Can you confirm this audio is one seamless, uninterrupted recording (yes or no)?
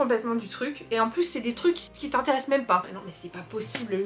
no